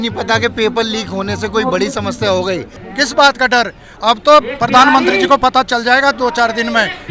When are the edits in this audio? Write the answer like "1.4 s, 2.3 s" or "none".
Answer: 2.8 s